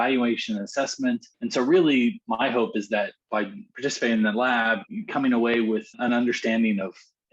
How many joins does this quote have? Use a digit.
4